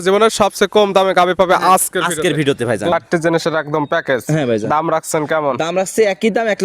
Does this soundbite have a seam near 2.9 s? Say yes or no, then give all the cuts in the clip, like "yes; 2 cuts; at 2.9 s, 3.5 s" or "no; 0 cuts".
yes; 1 cut; at 2.9 s